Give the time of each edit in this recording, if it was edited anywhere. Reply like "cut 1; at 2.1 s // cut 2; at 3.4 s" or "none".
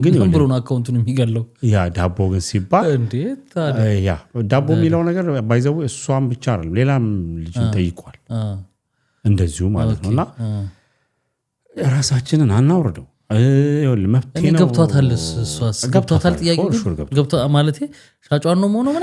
none